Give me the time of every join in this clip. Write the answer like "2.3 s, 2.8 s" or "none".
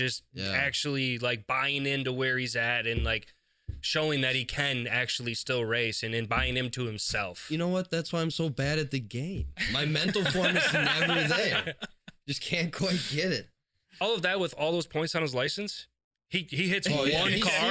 14.0 s

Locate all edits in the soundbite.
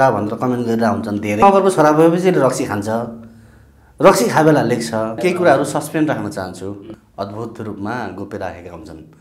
1.4 s, 5.2 s, 6.9 s

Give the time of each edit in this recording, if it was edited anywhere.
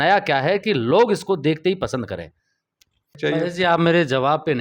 3.4 s

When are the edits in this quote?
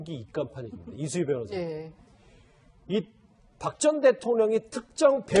2.5 s

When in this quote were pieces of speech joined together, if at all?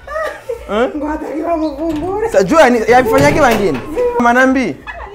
4.2 s

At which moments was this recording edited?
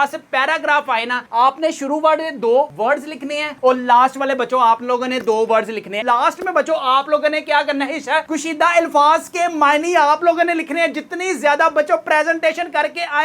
6.0 s

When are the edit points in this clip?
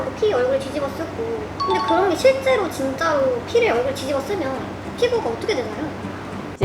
none

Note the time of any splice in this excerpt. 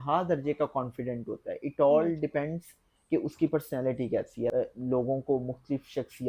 4.5 s

